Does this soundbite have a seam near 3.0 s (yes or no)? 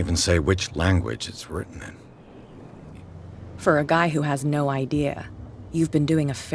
yes